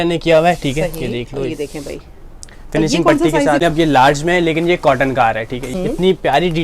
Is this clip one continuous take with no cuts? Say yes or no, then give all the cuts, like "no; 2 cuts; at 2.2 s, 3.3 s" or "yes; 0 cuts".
no; 2 cuts; at 3.6 s, 5.7 s